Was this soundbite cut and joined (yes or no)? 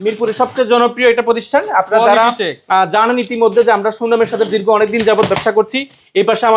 no